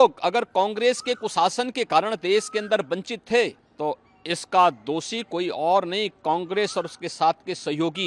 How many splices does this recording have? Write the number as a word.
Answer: one